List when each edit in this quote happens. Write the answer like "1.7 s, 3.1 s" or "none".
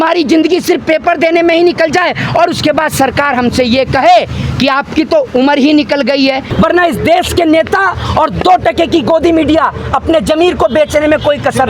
6.5 s